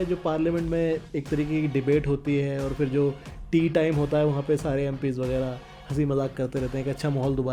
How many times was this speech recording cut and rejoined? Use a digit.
0